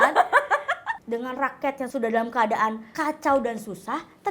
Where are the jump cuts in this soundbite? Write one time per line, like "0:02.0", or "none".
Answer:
0:00.9
0:01.9
0:02.9